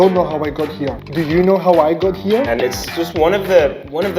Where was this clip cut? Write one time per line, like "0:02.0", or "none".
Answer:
0:02.5